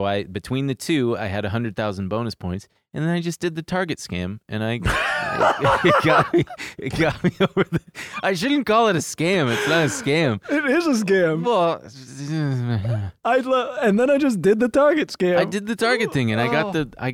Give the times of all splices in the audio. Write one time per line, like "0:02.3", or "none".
none